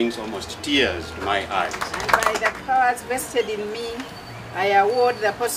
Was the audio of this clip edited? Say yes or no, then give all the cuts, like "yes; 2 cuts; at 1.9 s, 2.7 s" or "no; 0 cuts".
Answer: yes; 1 cut; at 1.9 s